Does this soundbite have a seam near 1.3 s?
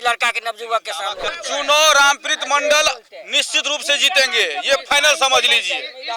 yes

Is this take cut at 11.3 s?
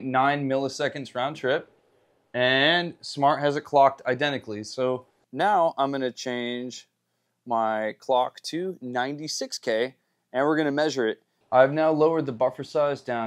yes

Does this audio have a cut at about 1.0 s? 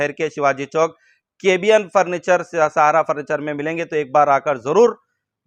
no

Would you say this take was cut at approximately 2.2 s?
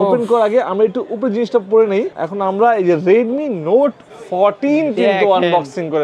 yes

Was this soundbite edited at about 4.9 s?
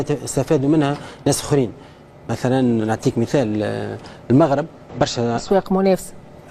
no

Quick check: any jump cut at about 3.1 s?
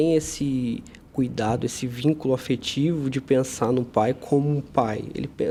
no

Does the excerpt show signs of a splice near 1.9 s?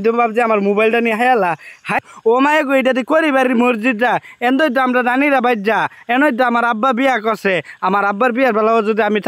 yes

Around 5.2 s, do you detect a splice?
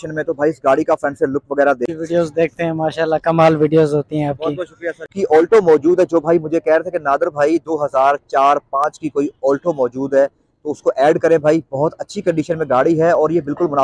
yes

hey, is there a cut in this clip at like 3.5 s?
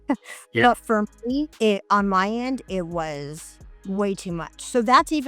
no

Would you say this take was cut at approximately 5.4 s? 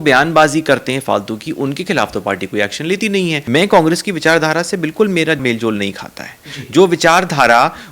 yes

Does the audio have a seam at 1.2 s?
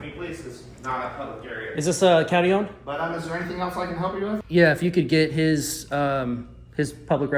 no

